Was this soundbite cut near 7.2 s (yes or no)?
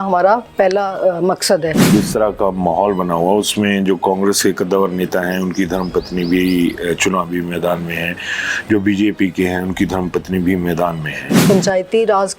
no